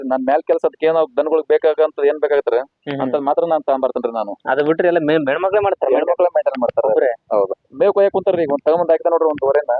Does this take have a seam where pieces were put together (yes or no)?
no